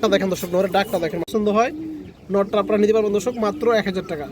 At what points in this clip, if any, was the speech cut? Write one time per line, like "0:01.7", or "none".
0:01.3